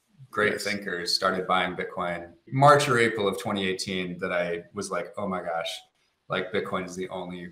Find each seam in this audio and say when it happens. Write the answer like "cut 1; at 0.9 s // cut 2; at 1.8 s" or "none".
cut 1; at 2.4 s